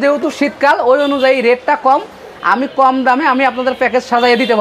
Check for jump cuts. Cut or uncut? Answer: uncut